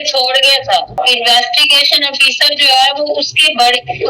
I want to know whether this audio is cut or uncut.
cut